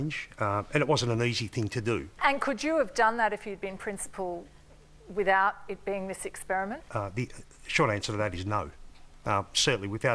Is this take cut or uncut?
uncut